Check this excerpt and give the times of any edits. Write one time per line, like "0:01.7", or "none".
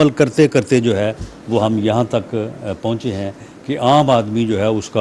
none